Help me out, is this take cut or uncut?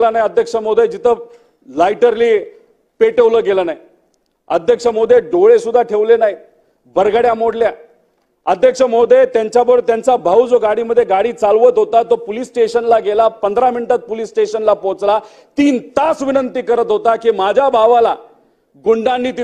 uncut